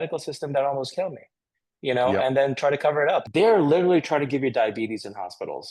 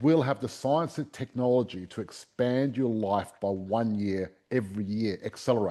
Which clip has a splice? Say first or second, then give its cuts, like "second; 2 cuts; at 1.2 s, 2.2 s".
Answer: first; 1 cut; at 3.3 s